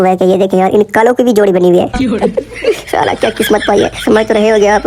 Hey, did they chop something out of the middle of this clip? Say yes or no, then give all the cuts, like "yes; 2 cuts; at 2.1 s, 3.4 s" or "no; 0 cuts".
no; 0 cuts